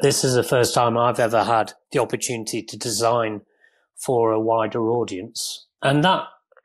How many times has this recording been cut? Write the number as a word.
one